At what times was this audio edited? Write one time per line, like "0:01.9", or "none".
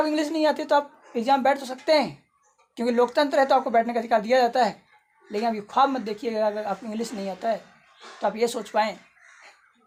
none